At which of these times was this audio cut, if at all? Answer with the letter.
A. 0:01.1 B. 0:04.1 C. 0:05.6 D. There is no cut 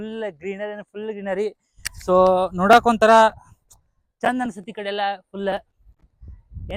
D